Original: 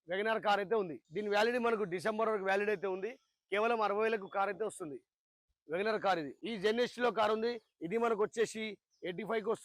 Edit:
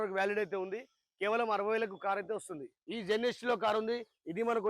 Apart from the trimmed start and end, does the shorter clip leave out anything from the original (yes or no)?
yes